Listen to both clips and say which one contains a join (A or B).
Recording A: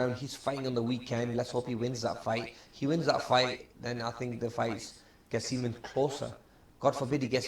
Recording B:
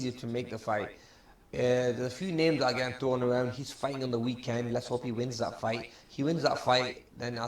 B